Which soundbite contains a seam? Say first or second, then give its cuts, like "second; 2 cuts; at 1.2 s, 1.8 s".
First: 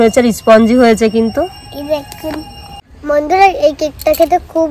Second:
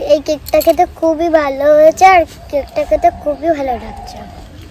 first; 1 cut; at 2.6 s